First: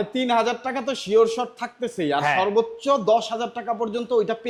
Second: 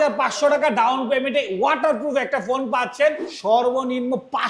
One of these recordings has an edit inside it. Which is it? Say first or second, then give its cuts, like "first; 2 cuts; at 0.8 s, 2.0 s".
second; 1 cut; at 3.3 s